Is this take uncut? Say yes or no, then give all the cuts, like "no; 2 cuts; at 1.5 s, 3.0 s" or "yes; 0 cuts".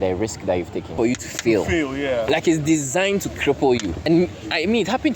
no; 2 cuts; at 0.9 s, 4.0 s